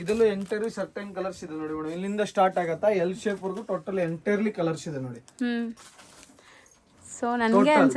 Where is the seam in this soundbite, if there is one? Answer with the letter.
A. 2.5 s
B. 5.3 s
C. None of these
C